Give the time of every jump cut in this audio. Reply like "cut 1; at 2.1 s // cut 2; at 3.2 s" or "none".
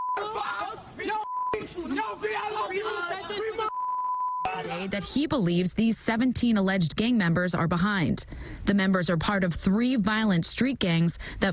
cut 1; at 4.9 s